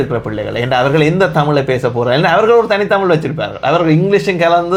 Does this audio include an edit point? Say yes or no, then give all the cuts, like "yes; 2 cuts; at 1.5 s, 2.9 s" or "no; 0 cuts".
no; 0 cuts